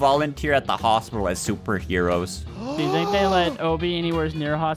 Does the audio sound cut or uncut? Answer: uncut